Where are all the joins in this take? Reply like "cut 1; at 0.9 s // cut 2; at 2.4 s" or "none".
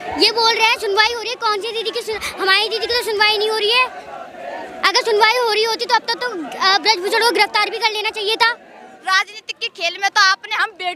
cut 1; at 9.0 s